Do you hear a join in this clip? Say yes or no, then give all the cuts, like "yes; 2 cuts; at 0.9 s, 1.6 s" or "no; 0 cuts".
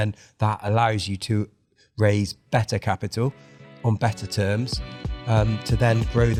no; 0 cuts